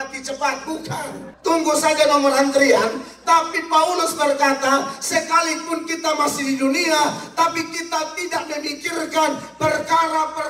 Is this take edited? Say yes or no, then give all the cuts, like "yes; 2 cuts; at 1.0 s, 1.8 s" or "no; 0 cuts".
yes; 1 cut; at 1.2 s